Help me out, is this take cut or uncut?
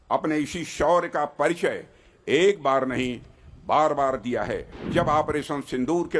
cut